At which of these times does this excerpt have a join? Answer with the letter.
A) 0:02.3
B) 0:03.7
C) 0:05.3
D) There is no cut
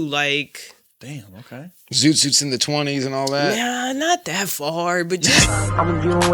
C